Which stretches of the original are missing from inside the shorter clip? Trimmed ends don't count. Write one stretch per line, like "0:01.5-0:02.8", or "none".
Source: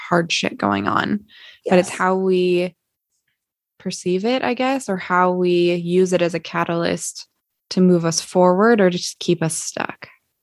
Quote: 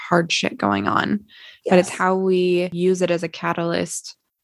0:02.7-0:05.8

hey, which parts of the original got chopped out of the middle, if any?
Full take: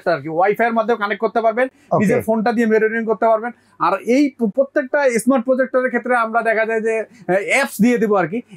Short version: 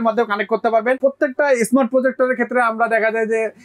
0:01.7-0:04.5

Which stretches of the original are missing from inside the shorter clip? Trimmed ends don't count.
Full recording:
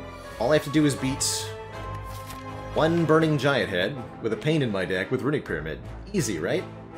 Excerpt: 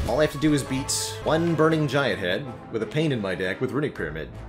0:01.4-0:02.5

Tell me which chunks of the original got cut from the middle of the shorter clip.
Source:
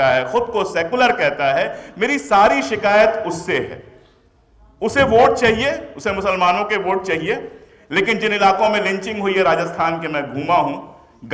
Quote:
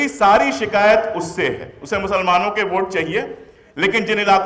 0:03.9-0:05.9

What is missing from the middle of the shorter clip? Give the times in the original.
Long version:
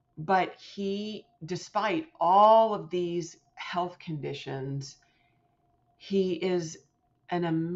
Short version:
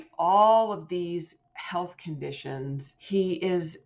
0:04.9-0:05.9

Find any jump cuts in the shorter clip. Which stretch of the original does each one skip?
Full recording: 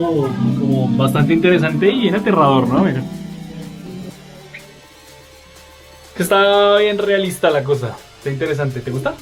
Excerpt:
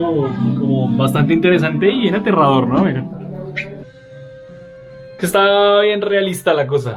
0:03.2-0:04.1

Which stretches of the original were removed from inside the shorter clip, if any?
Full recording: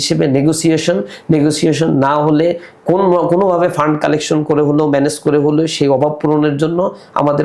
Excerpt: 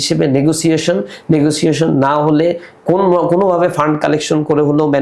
none

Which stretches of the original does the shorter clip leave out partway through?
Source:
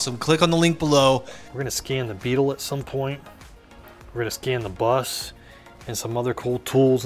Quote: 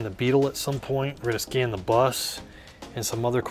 0:03.2-0:04.1

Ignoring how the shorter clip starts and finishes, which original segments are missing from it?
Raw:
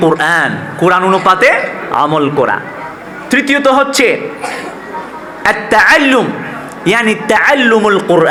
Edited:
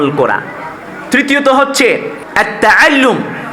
0:04.4-0:05.3

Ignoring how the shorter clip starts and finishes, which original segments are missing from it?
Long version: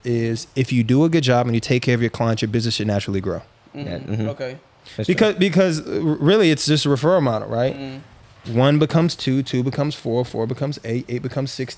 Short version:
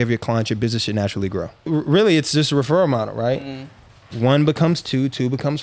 0:03.5-0:05.9

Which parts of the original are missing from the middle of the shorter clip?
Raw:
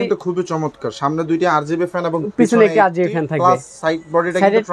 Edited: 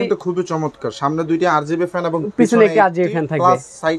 none

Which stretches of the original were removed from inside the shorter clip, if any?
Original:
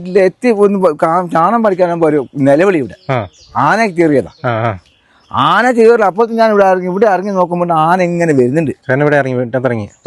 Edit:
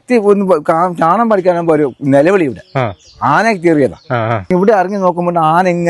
0:04.8-0:06.8

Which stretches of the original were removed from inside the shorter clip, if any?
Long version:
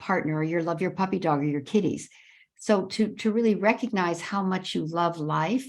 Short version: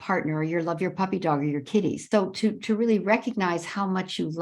0:02.0-0:02.6

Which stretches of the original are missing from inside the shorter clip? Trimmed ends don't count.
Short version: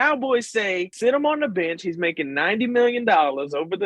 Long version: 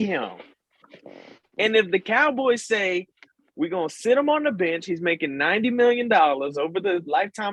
0:03.1-0:04.0

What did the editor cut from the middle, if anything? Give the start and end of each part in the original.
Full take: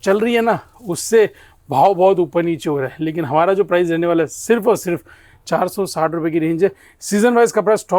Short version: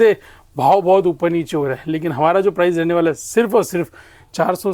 none

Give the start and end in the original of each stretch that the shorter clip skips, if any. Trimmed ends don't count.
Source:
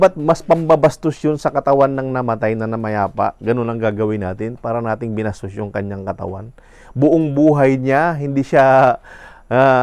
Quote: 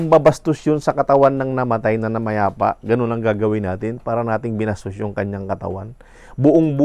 none

